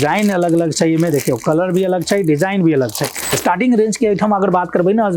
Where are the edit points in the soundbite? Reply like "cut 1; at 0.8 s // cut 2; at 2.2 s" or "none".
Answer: cut 1; at 3.4 s